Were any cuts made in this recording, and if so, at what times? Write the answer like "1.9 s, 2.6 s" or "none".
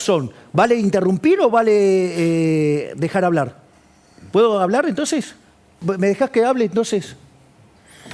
5.8 s